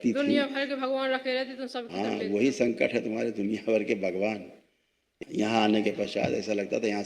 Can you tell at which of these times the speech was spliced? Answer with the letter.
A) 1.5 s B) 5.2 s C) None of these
B